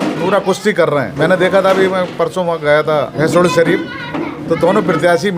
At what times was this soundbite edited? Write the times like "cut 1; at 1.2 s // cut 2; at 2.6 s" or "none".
cut 1; at 1.1 s // cut 2; at 3.1 s // cut 3; at 4.4 s